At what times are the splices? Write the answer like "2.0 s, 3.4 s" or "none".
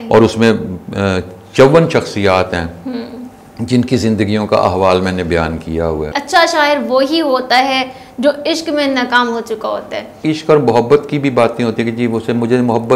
6.1 s, 10.2 s

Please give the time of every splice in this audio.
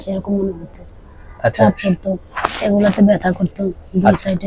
none

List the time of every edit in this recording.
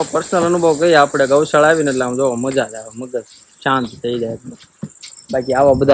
none

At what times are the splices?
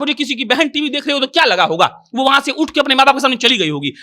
none

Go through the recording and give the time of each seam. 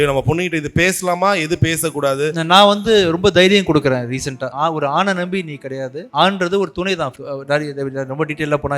4.5 s, 6.0 s, 7.1 s

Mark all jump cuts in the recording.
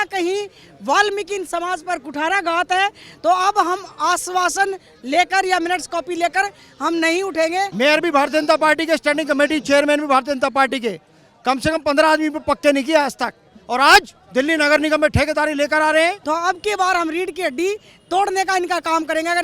7.7 s, 16.2 s

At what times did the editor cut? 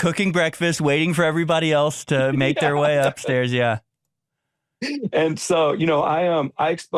none

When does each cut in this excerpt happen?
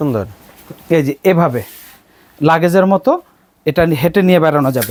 none

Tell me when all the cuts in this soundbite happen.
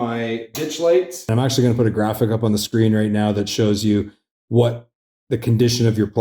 1.2 s

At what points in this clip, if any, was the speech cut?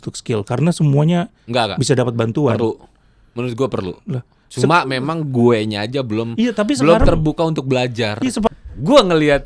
8.5 s

